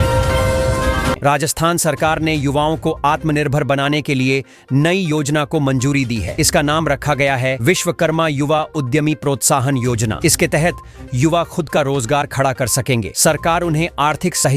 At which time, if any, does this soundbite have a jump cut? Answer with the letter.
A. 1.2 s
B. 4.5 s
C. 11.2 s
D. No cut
A